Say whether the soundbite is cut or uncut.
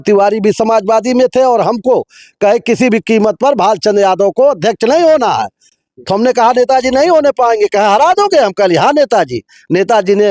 uncut